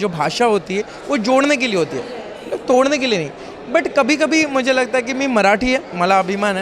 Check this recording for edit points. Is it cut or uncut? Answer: uncut